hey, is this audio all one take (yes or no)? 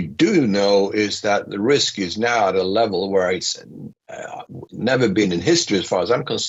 yes